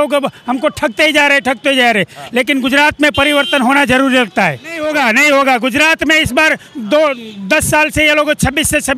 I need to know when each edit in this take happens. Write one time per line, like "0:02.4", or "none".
0:04.8